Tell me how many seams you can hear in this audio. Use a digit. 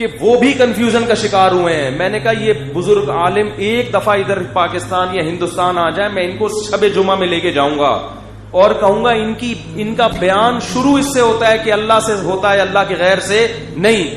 0